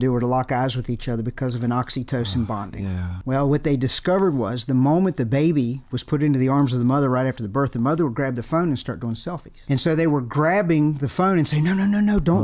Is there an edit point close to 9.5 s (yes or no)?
yes